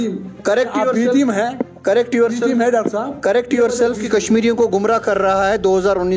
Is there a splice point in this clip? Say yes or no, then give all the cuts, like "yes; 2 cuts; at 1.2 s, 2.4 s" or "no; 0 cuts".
yes; 1 cut; at 4.0 s